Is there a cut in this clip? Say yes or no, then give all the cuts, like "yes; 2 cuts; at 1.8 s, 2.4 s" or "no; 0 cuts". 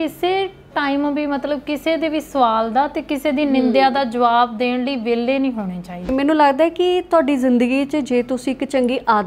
yes; 1 cut; at 6.1 s